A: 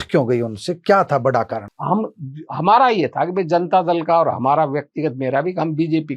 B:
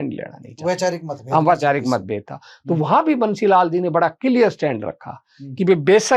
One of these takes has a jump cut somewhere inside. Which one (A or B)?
A